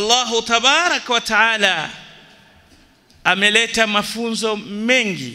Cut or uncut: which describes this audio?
uncut